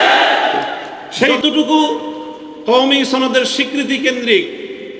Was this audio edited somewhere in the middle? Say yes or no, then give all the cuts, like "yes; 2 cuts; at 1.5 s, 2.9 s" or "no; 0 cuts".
yes; 1 cut; at 1.4 s